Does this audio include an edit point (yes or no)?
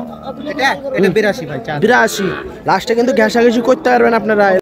no